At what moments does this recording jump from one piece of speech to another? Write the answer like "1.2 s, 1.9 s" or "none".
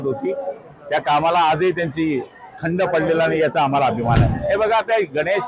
4.3 s